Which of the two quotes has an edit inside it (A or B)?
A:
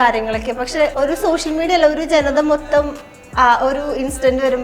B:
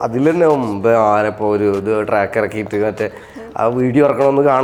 A